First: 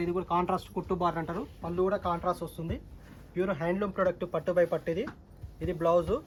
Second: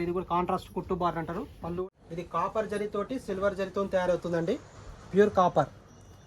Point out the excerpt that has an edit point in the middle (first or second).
second